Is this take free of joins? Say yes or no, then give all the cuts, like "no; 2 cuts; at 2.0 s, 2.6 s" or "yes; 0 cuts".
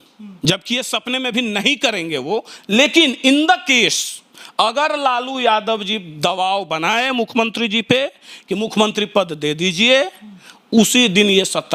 yes; 0 cuts